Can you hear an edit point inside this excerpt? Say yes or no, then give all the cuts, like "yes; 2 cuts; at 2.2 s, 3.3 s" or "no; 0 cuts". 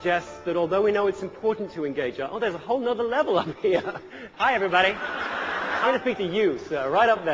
yes; 2 cuts; at 4.2 s, 5.8 s